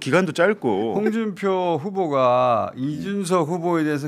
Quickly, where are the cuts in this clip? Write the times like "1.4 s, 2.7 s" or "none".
0.9 s

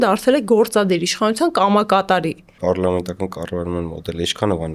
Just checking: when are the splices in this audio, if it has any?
2.5 s

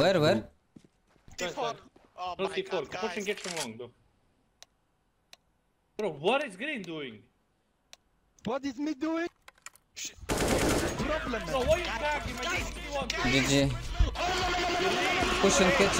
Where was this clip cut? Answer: none

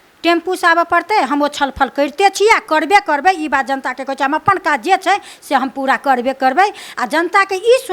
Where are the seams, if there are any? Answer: none

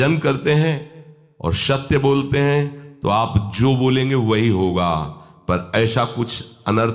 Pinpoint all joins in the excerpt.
none

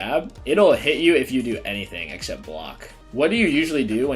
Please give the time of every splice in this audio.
2.9 s

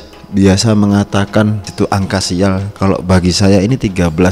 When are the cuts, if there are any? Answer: 1.7 s

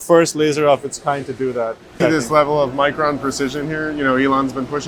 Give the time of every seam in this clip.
1.8 s

